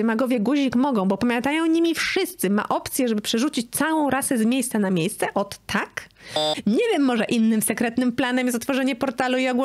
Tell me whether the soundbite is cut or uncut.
cut